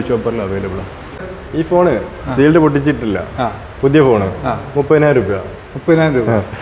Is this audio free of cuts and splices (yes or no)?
no